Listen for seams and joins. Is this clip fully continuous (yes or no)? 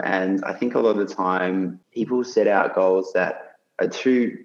no